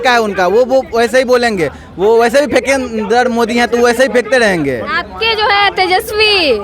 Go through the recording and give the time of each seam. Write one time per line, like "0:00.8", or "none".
none